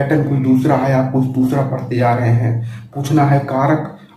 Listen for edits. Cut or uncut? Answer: uncut